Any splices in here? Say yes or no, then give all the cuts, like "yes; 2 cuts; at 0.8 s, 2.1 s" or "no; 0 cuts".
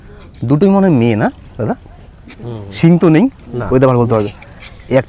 no; 0 cuts